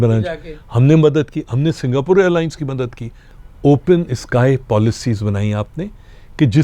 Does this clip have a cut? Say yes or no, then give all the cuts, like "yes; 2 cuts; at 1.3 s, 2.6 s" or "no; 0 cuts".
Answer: yes; 1 cut; at 3.3 s